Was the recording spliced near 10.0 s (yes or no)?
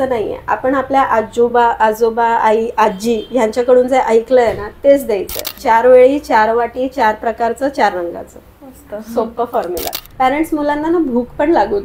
yes